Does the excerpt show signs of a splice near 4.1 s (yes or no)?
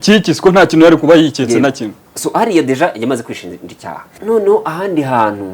yes